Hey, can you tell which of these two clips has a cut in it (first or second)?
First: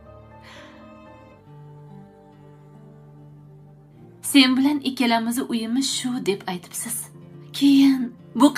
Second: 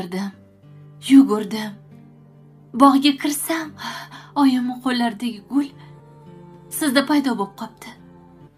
first